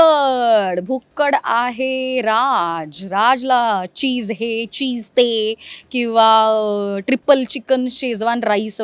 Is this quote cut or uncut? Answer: uncut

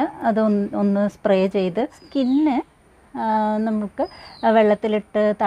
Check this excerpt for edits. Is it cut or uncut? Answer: cut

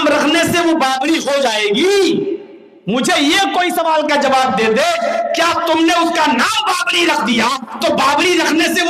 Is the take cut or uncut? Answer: uncut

